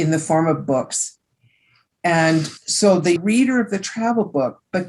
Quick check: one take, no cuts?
no; 1 cut; at 3.2 s

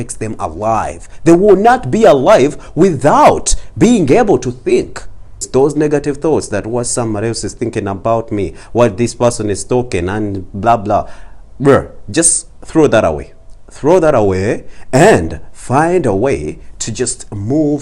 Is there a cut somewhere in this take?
yes; 1 cut; at 5.4 s

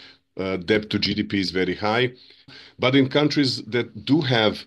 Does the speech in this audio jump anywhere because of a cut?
yes; 1 cut; at 2.5 s

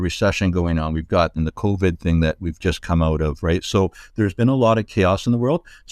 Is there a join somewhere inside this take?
yes; 1 cut; at 1.4 s

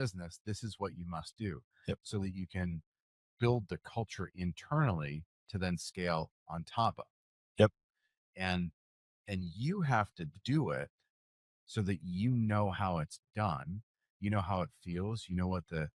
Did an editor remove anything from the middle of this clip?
no; 0 cuts

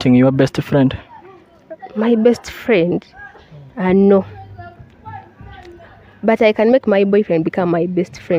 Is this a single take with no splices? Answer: yes; 0 cuts

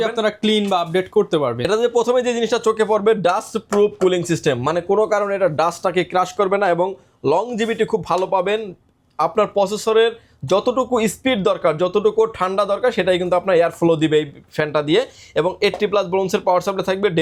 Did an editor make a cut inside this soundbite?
no; 0 cuts

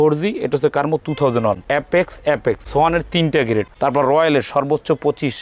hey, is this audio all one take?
no; 3 cuts; at 1.6 s, 2.6 s, 3.7 s

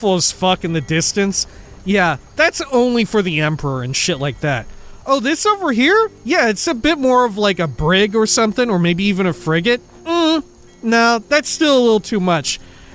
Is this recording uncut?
no; 2 cuts; at 6.2 s, 9.9 s

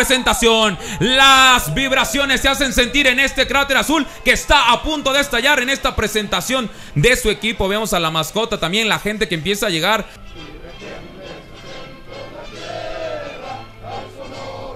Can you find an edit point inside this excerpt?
yes; 1 cut; at 2.1 s

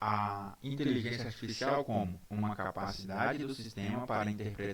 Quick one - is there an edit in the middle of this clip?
yes; 1 cut; at 2.2 s

